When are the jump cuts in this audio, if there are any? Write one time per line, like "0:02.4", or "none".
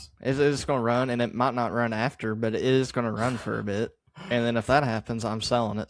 none